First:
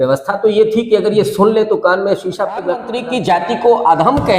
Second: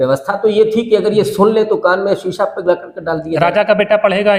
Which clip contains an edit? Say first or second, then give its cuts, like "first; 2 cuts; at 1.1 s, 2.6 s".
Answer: first; 1 cut; at 2.9 s